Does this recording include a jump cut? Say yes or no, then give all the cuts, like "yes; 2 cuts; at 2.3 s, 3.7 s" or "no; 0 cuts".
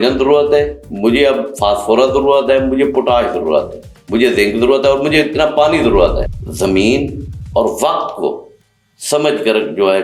yes; 1 cut; at 6.2 s